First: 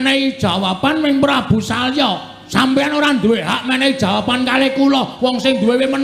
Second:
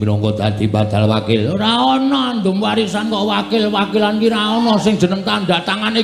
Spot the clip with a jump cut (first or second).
first